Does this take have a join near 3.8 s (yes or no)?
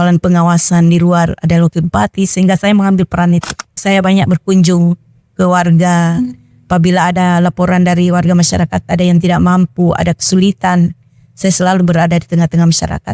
yes